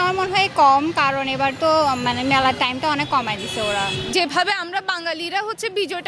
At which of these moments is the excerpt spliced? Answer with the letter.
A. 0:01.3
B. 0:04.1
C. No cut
B